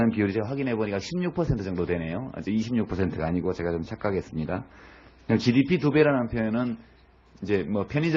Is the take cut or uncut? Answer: cut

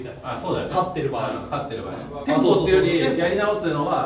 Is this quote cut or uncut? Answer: cut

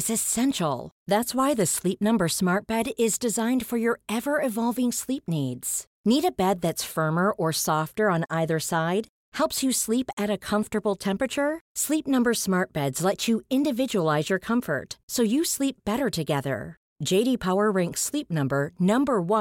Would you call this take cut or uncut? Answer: uncut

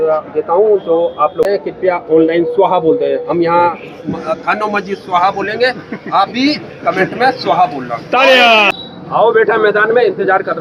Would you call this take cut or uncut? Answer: cut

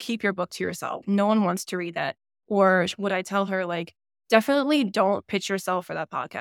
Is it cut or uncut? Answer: cut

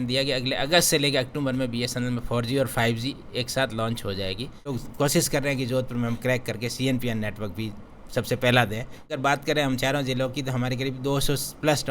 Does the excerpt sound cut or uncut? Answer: cut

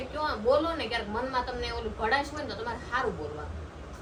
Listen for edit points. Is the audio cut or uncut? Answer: uncut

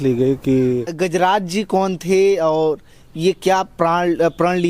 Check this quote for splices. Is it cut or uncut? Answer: cut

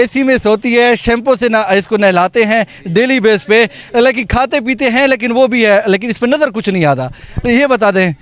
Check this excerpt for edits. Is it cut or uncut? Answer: uncut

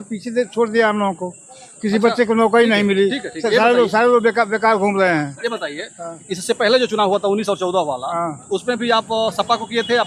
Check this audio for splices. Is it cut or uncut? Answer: uncut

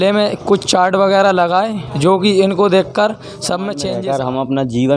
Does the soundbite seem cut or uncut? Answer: cut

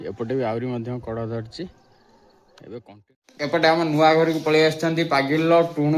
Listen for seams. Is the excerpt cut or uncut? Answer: cut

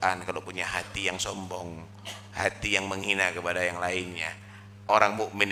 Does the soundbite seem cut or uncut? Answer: uncut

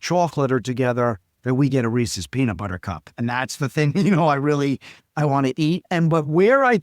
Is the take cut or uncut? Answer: cut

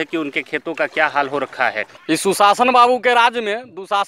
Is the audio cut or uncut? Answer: cut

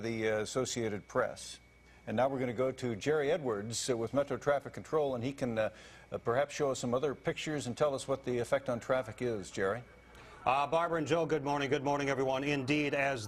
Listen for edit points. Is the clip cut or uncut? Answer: cut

